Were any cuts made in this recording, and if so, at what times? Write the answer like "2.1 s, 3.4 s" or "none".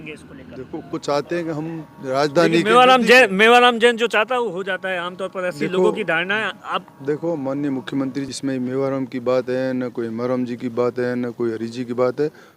0.9 s, 8.3 s